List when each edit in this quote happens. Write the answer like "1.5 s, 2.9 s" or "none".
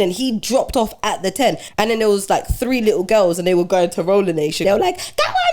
1.6 s, 4.6 s